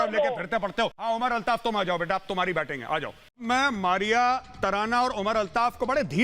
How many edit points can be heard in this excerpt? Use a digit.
2